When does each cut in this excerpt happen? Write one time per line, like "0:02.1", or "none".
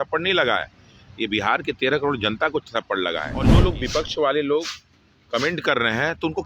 0:03.5